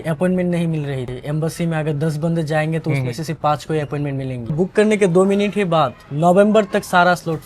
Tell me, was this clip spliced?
yes; 2 cuts; at 1.1 s, 4.5 s

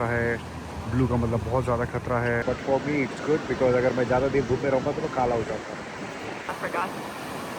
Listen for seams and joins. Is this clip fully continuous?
no; 2 cuts; at 2.4 s, 6.4 s

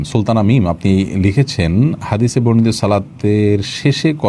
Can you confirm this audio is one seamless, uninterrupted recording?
yes; 0 cuts

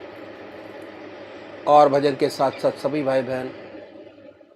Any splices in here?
no; 0 cuts

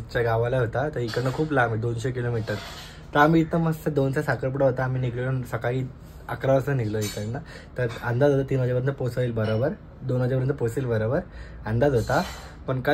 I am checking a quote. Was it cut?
no; 0 cuts

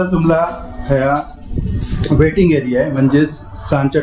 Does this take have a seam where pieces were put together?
no; 0 cuts

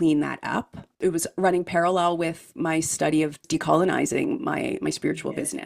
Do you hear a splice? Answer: yes; 3 cuts; at 0.9 s, 2.6 s, 3.4 s

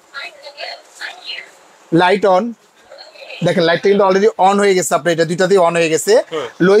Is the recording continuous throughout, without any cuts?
yes; 0 cuts

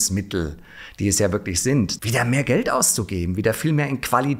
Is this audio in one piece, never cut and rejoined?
no; 1 cut; at 2.0 s

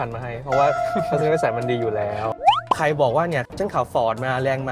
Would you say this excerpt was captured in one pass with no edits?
no; 2 cuts; at 2.4 s, 3.5 s

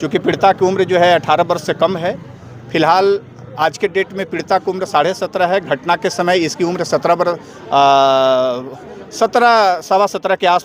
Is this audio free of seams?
yes; 0 cuts

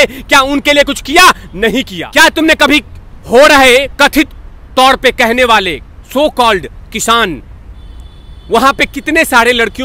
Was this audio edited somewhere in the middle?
yes; 1 cut; at 2.0 s

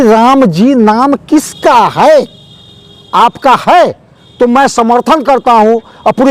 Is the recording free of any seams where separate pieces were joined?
yes; 0 cuts

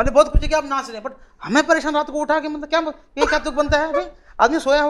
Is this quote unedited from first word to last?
yes; 0 cuts

